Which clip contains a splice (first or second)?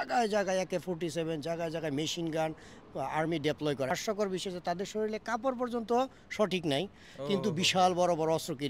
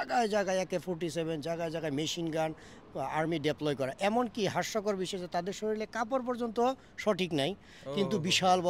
first